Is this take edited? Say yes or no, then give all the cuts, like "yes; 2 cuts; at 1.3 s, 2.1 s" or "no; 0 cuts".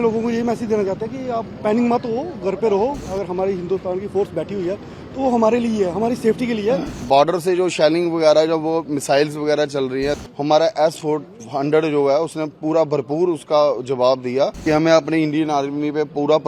yes; 4 cuts; at 3.0 s, 7.0 s, 10.2 s, 14.6 s